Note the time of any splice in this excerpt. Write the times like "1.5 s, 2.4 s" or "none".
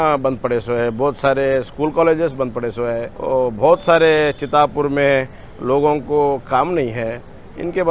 3.1 s